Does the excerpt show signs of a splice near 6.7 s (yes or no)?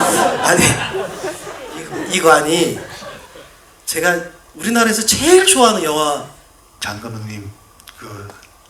yes